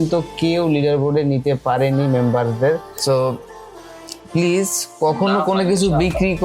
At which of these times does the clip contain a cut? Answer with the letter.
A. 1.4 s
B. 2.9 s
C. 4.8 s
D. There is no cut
B